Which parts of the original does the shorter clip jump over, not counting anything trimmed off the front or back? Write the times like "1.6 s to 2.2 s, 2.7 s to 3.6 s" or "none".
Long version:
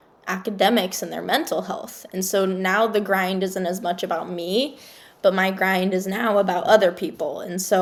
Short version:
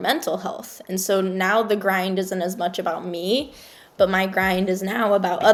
none